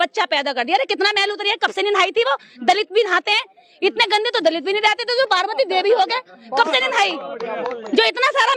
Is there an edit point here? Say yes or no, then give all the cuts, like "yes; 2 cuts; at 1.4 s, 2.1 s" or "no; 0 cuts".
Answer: no; 0 cuts